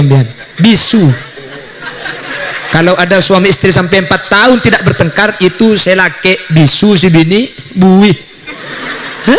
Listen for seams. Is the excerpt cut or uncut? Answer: uncut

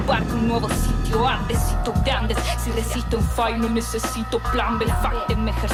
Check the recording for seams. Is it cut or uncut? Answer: uncut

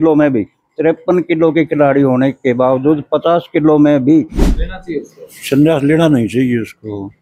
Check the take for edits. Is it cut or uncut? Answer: cut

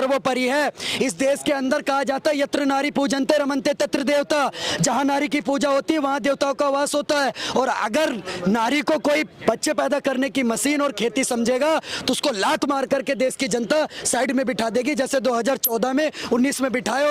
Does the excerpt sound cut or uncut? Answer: uncut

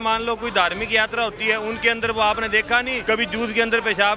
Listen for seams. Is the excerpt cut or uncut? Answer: cut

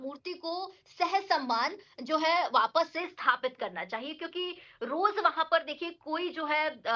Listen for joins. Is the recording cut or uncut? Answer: uncut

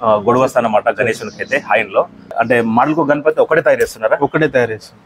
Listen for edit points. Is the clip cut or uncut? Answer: cut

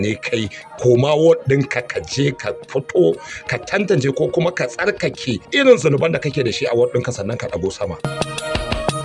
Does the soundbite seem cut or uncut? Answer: cut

